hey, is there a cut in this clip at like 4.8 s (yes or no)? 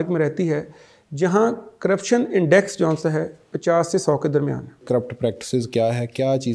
yes